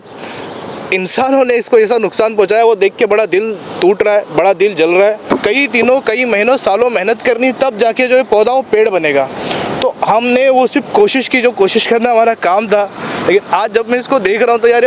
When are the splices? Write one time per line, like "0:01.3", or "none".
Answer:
0:05.2